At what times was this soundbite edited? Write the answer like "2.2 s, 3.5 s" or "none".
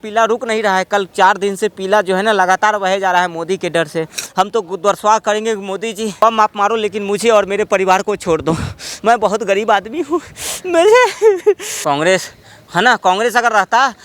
4.2 s, 6.2 s, 11.7 s